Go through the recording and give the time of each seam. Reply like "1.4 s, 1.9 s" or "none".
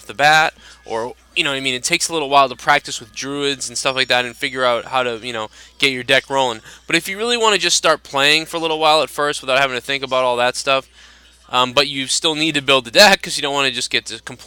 none